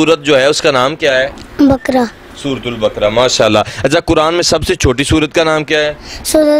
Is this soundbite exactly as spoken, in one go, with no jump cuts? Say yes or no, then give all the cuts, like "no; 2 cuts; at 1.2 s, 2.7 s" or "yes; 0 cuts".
yes; 0 cuts